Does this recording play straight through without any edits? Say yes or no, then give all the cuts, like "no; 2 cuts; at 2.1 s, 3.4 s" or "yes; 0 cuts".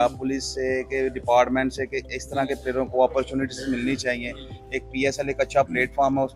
yes; 0 cuts